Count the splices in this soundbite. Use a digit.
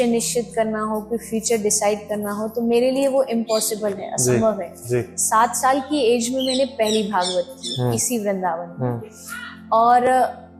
0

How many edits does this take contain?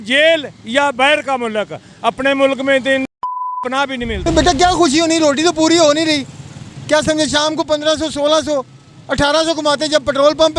1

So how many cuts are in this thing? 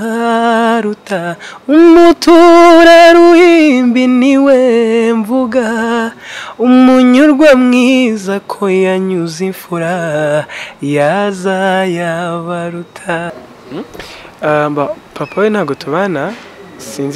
1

